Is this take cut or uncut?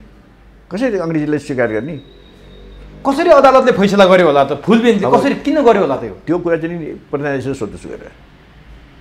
uncut